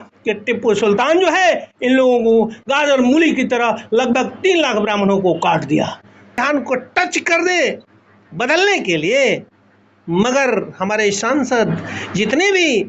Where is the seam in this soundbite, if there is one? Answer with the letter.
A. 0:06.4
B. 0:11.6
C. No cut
A